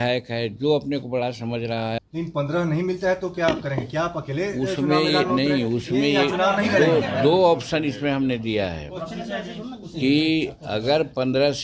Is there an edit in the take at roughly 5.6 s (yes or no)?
no